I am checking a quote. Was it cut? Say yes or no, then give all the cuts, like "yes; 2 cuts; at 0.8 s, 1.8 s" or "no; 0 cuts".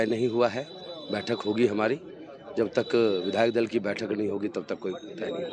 no; 0 cuts